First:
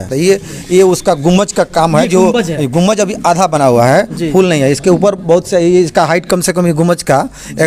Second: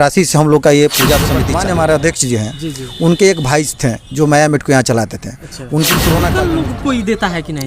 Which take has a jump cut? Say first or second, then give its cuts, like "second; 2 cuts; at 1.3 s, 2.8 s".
second; 2 cuts; at 1.4 s, 6.4 s